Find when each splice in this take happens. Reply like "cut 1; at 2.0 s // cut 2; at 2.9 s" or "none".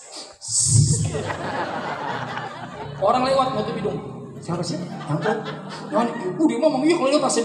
cut 1; at 1.4 s